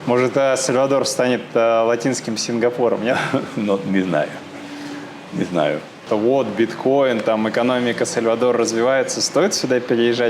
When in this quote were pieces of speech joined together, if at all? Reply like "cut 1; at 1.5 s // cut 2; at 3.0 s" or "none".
cut 1; at 6.0 s

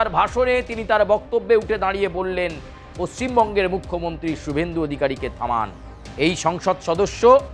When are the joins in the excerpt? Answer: none

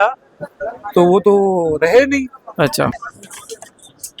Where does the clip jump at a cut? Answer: cut 1; at 3.0 s

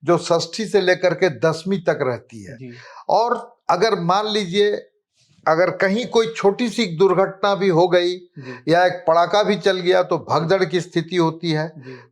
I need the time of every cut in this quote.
none

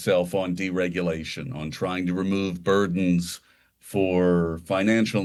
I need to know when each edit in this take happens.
none

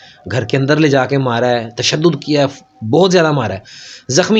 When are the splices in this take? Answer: none

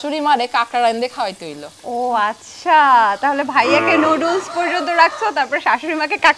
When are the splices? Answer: none

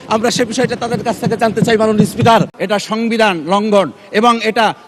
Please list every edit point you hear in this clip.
cut 1; at 2.6 s

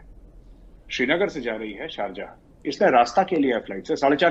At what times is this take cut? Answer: none

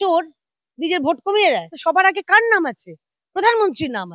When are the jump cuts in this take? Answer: cut 1; at 1.7 s

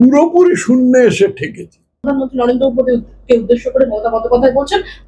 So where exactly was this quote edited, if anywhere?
cut 1; at 2.0 s

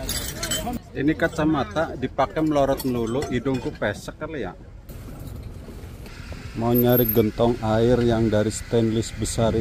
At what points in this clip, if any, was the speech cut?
cut 1; at 4.9 s // cut 2; at 6.1 s

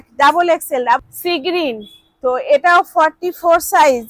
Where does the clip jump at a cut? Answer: cut 1; at 1.0 s

